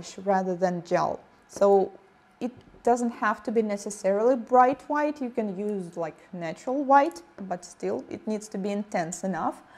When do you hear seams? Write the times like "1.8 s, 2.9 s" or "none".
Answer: 5.6 s